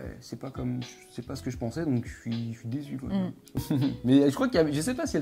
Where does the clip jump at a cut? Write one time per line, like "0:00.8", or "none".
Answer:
0:03.6

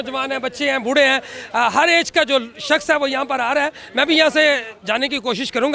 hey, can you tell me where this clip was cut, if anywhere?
none

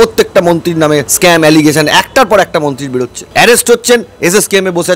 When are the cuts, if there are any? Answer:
0:01.1
0:03.2

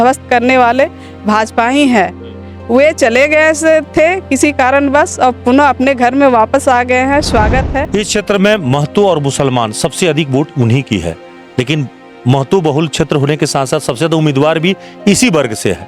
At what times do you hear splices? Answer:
0:07.8

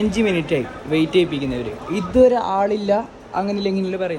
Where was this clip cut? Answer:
none

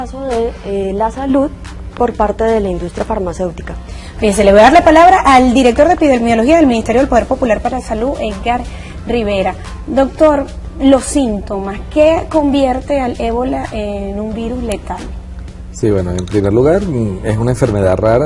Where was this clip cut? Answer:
0:05.9

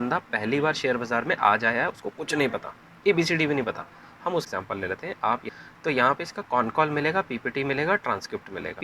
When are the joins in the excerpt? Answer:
0:04.5
0:05.5

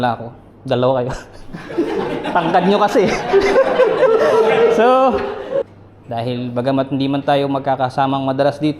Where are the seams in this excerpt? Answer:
0:05.6

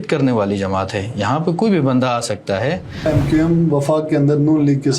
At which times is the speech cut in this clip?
0:03.1

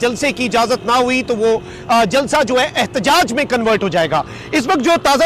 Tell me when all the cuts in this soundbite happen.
none

